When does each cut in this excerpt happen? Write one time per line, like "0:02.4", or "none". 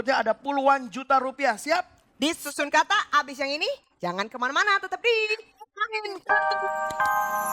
0:06.3